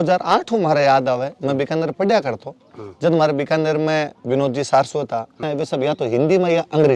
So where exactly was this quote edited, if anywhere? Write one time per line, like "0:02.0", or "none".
0:05.4